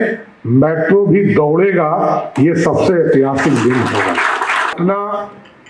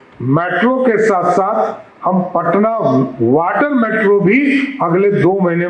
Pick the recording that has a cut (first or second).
first